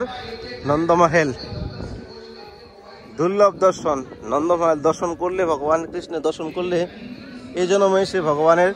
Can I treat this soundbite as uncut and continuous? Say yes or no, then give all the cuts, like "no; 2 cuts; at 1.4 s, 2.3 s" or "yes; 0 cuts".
yes; 0 cuts